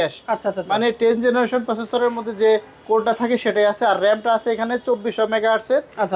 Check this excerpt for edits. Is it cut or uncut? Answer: uncut